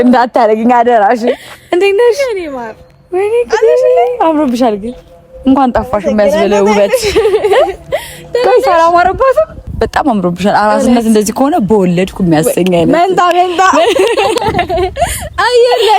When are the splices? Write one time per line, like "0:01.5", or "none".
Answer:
0:09.6

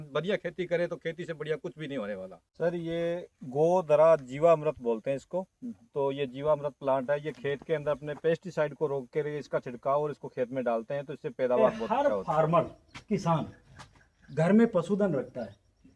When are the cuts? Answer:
0:02.4
0:11.8

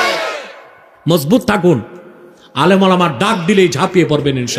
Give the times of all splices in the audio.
none

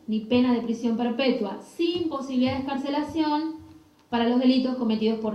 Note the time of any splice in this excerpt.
0:02.4

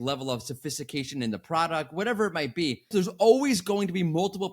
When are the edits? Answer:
0:02.9

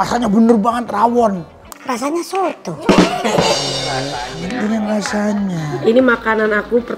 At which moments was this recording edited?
0:03.6
0:05.7

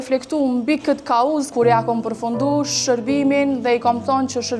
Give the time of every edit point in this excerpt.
0:01.5

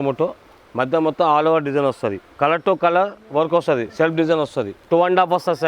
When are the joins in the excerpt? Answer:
0:04.7

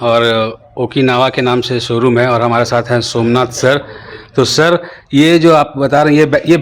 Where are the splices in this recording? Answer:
none

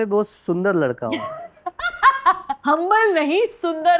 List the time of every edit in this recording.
0:02.5

